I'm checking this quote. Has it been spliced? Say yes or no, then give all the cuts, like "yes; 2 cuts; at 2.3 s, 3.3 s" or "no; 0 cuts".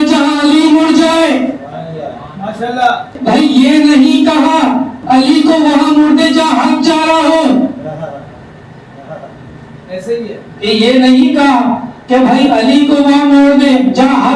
yes; 2 cuts; at 3.2 s, 5.0 s